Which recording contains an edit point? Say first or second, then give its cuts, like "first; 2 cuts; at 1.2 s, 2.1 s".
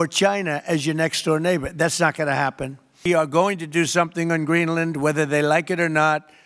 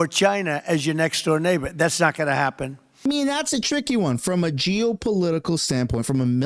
first; 1 cut; at 3.0 s